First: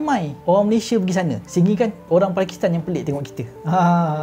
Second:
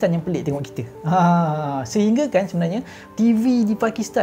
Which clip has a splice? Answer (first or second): second